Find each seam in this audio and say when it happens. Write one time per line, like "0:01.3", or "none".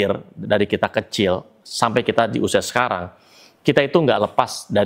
none